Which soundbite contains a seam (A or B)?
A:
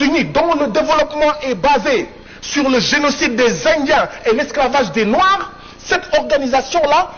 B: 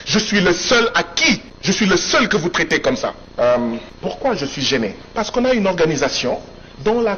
B